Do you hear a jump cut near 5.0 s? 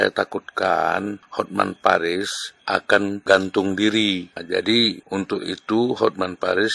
yes; 4 cuts; at 1.2 s, 2.8 s, 4.4 s, 5.0 s

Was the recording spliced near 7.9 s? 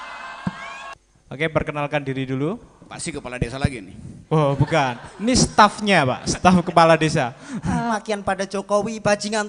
yes; 2 cuts; at 0.9 s, 7.9 s

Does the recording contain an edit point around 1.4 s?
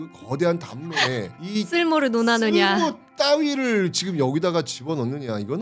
yes; 1 cut; at 1.4 s

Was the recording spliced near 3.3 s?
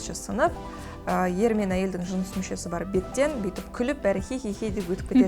no; 0 cuts

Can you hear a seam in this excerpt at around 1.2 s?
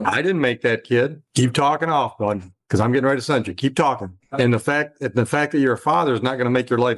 yes; 2 cuts; at 1.2 s, 4.2 s

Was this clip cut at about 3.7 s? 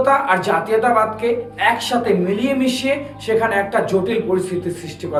no; 0 cuts

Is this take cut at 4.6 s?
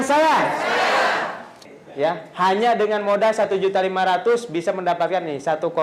no; 1 cut; at 1.6 s

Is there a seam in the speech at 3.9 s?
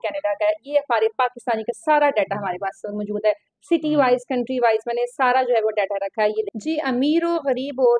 no; 1 cut; at 6.5 s

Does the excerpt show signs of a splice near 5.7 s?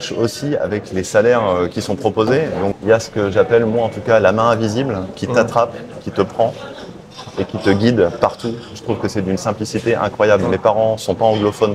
no; 1 cut; at 2.8 s

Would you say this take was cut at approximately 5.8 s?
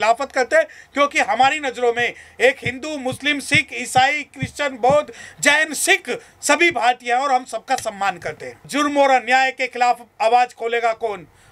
no; 1 cut; at 8.7 s

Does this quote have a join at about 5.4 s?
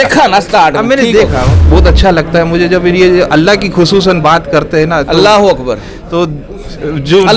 no; 1 cut; at 1.6 s

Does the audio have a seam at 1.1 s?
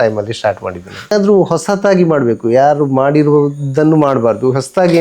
yes; 1 cut; at 1.1 s

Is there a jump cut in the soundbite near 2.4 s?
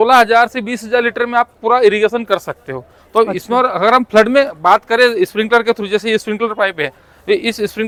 no; 0 cuts

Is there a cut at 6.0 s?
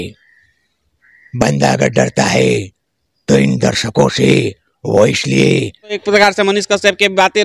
yes; 1 cut; at 6.0 s

